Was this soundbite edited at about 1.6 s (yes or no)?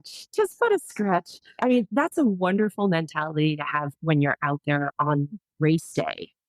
yes